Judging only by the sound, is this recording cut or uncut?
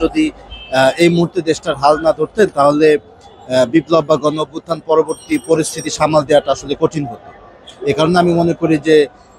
uncut